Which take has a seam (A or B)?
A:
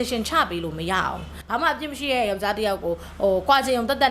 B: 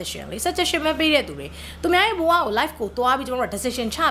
A